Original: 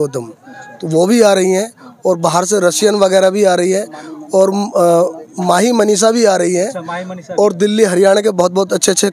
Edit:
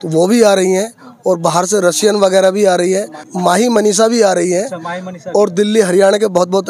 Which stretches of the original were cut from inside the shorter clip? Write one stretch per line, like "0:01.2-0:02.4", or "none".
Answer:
0:04.0-0:05.3